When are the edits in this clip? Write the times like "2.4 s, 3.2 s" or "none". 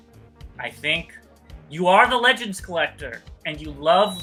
none